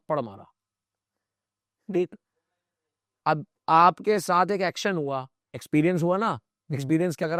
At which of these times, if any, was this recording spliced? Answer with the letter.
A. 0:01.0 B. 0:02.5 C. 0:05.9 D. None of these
D